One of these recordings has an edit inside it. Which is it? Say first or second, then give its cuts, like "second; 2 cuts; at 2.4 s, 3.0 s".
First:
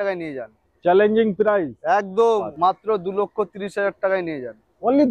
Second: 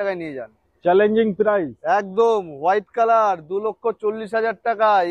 first; 1 cut; at 2.5 s